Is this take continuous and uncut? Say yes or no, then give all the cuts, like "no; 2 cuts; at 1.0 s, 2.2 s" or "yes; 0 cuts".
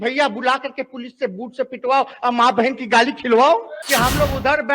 no; 1 cut; at 3.7 s